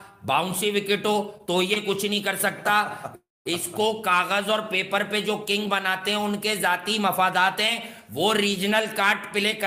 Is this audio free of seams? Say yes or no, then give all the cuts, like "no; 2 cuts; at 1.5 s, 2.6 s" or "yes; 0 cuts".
yes; 0 cuts